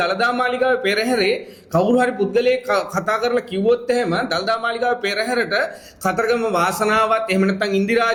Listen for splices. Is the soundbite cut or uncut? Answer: uncut